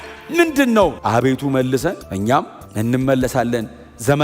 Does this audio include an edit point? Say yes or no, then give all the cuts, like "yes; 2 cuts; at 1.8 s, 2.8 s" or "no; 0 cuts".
yes; 1 cut; at 1.0 s